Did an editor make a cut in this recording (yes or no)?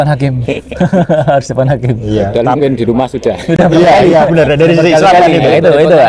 no